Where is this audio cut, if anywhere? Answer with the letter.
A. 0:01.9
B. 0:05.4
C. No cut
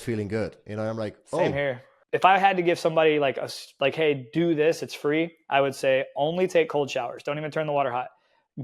A